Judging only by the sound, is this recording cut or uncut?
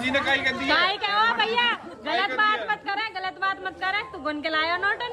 uncut